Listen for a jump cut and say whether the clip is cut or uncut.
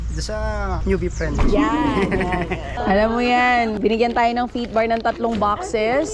uncut